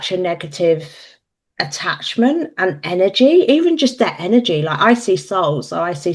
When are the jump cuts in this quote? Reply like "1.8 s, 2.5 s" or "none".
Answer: none